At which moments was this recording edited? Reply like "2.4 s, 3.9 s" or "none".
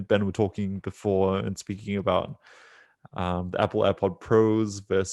none

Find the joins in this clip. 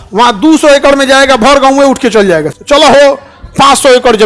none

